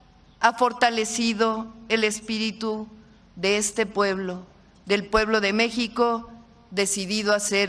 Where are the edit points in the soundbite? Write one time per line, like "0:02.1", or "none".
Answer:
none